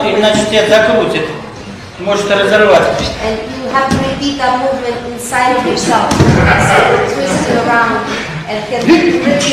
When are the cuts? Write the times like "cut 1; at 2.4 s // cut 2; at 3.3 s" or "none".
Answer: cut 1; at 2.6 s // cut 2; at 3.9 s